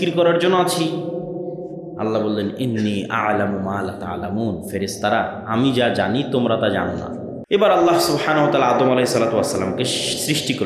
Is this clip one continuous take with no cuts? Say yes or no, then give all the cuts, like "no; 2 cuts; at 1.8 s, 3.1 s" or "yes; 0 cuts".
no; 1 cut; at 7.3 s